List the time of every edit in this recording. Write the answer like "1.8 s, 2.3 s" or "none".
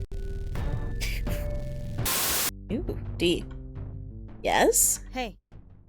2.0 s